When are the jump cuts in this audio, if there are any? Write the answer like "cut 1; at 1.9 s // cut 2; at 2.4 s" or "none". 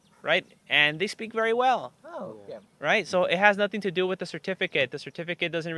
none